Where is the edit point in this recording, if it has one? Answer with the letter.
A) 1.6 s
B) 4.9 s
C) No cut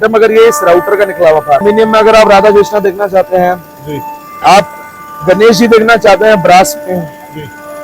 A